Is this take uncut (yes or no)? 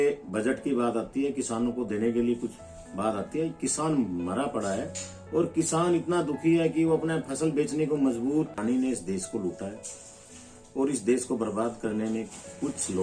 no